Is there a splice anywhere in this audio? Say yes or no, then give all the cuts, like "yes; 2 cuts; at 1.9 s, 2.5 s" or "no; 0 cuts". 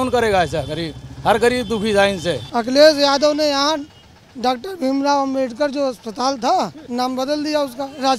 yes; 2 cuts; at 2.4 s, 6.8 s